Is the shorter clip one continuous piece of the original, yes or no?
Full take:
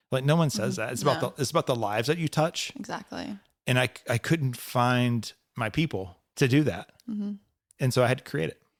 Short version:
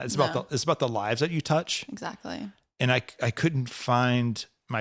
yes